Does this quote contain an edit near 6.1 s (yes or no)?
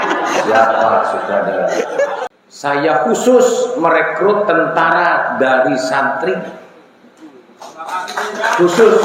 no